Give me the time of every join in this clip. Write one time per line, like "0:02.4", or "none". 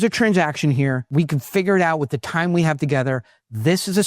0:01.0